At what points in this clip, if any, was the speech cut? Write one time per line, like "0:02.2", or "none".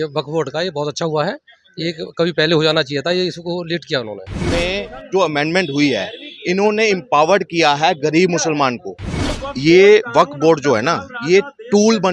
0:04.4
0:09.4

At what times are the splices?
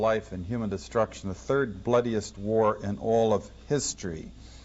0:01.7

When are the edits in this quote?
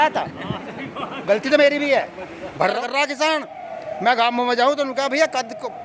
0:02.8

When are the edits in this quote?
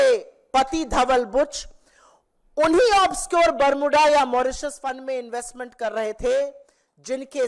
none

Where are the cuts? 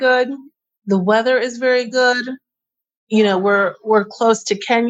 none

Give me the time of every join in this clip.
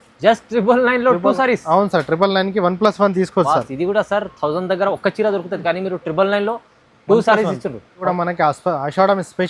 0:08.0

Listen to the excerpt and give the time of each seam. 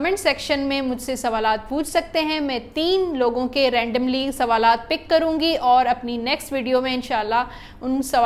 none

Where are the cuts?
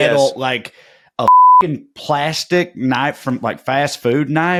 none

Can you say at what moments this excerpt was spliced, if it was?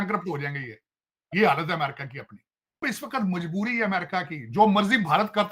0:02.8

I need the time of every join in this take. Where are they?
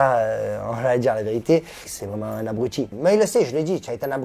0:01.9

